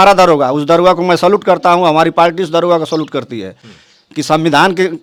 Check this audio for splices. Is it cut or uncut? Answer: uncut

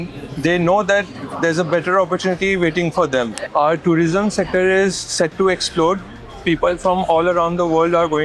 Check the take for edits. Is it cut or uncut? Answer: cut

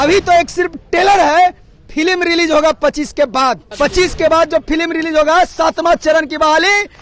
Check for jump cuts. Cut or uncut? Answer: cut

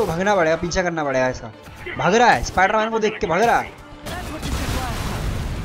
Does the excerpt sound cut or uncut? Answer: uncut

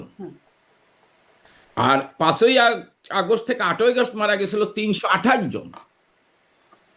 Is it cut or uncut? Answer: uncut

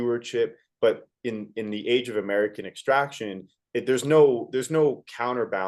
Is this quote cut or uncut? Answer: uncut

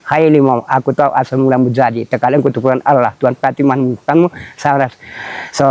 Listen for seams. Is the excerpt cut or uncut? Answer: uncut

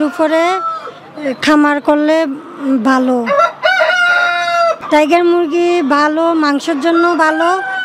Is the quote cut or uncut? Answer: cut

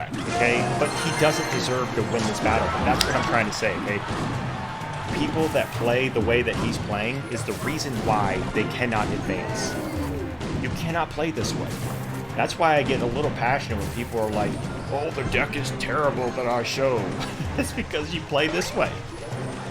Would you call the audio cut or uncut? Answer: uncut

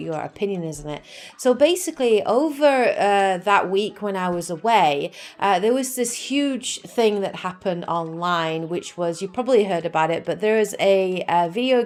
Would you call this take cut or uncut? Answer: uncut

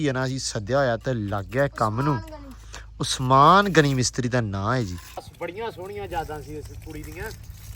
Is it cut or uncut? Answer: cut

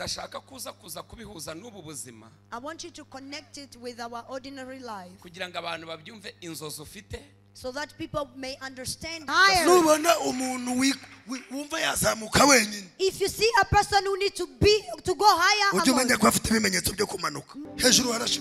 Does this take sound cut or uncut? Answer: cut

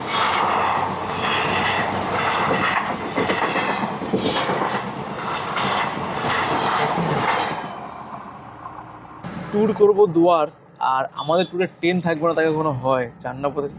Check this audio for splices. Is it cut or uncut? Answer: uncut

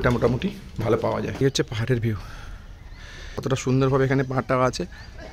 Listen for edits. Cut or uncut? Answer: cut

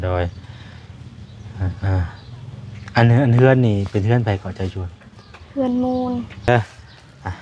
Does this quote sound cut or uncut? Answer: cut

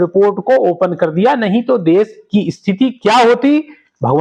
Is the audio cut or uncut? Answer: uncut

